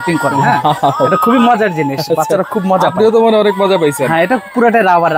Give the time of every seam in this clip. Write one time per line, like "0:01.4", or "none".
none